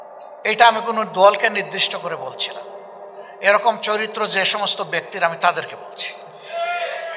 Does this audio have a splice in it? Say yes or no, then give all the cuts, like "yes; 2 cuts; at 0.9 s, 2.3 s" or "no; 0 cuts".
no; 0 cuts